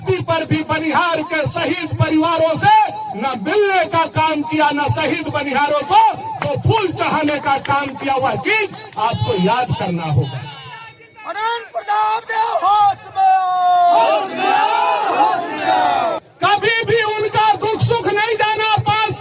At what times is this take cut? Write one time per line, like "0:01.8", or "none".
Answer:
0:02.1
0:16.3